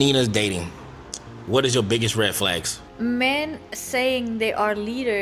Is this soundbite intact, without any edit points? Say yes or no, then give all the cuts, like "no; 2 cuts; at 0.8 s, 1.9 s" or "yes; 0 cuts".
no; 1 cut; at 2.8 s